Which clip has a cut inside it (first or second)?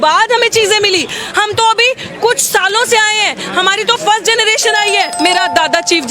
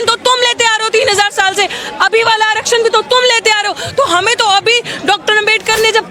first